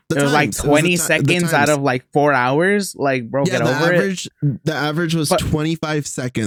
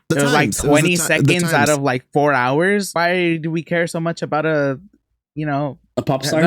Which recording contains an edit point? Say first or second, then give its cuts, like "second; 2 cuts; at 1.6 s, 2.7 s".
second; 1 cut; at 2.9 s